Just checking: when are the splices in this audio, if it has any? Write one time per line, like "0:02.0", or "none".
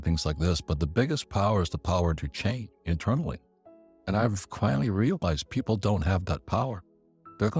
none